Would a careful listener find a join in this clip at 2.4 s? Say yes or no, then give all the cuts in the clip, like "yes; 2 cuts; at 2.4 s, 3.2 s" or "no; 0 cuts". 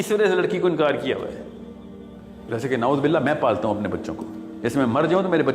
yes; 1 cut; at 2.4 s